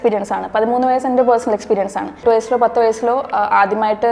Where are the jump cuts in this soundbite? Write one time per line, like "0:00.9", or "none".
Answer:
0:02.2